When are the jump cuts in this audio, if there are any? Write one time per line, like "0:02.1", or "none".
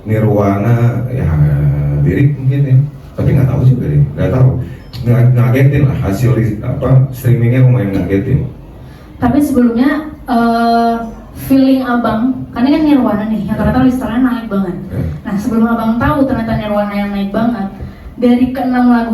none